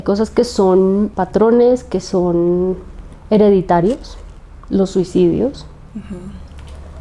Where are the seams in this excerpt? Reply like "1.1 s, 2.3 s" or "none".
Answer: 1.2 s